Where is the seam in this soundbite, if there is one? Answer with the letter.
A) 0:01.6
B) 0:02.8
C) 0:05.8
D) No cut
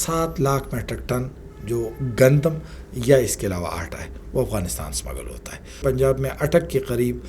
C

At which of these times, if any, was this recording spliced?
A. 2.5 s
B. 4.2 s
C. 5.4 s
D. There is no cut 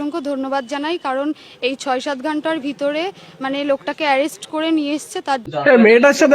C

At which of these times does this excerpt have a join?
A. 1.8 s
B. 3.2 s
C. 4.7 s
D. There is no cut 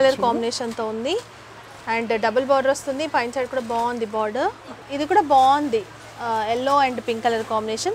C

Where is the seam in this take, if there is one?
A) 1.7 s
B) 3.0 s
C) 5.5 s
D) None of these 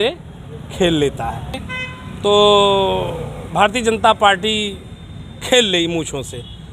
A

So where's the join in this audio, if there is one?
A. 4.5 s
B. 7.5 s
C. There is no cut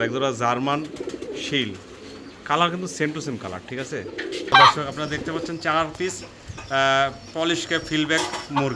A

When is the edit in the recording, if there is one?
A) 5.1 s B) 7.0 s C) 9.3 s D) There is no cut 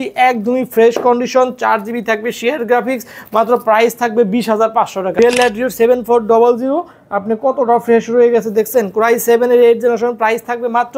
A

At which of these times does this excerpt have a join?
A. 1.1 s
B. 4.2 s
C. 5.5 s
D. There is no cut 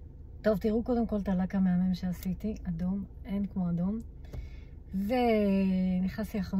D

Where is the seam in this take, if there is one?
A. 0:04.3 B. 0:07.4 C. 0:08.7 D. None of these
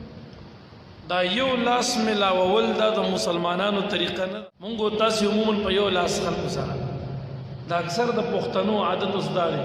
A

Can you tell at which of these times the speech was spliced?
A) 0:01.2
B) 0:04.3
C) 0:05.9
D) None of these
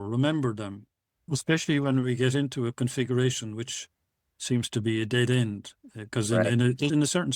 A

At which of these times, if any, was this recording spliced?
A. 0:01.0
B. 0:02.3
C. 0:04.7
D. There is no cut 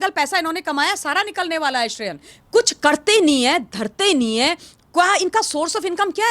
B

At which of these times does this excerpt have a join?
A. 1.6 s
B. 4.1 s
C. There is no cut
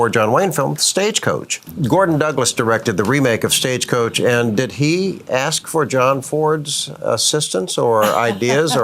A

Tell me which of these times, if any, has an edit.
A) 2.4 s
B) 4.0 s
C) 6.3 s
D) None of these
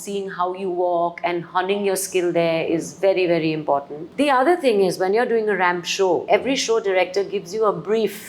B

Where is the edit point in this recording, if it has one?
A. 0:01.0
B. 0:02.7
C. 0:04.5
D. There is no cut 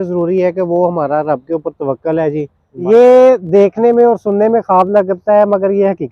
B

